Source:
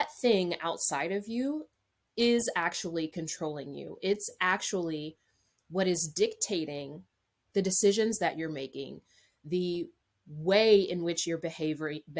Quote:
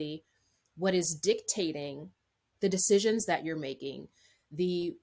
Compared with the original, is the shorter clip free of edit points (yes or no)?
yes